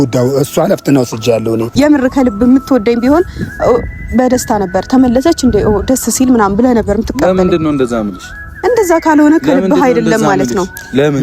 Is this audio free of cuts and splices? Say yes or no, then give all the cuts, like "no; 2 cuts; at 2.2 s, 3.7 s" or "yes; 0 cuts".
no; 1 cut; at 1.7 s